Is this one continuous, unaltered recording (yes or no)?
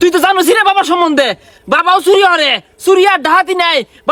yes